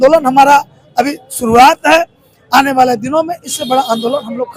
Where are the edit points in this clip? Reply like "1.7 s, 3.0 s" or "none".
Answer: none